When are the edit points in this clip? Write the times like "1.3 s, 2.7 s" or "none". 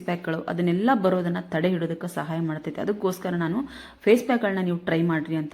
none